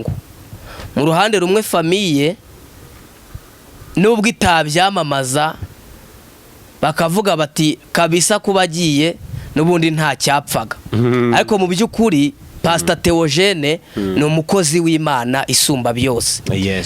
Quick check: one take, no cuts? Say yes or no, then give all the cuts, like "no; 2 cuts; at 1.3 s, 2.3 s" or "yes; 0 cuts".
yes; 0 cuts